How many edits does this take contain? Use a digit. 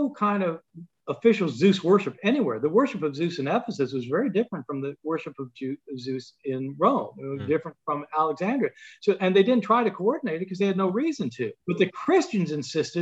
1